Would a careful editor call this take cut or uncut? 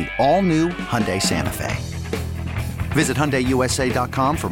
uncut